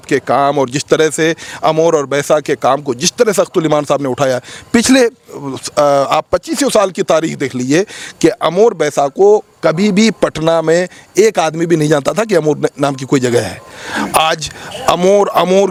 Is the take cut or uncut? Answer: uncut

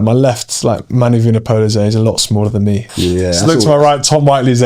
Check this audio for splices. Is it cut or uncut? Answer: cut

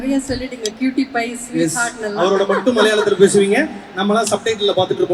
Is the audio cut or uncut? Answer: uncut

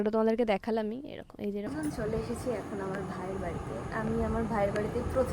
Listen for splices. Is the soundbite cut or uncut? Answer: cut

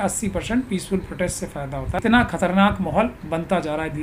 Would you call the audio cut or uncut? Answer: cut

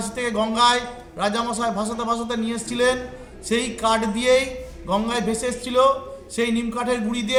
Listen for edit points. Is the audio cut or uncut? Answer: uncut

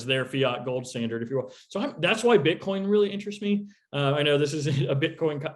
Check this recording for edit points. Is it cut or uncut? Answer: uncut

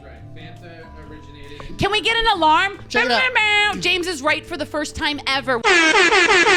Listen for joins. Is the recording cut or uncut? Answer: uncut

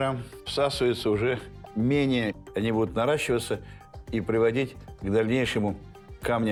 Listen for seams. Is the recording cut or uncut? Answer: uncut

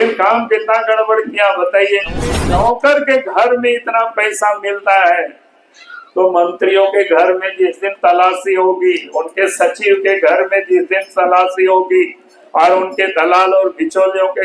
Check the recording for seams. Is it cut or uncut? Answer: cut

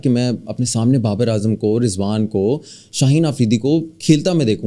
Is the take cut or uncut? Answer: uncut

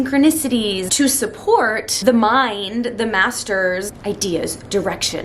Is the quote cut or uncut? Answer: cut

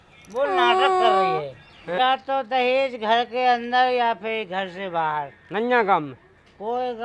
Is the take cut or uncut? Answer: cut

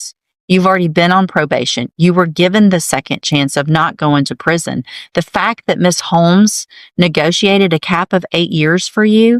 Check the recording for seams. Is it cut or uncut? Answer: uncut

